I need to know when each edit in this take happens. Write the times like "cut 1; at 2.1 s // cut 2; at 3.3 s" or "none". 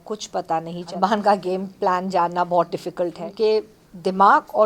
cut 1; at 0.9 s // cut 2; at 3.2 s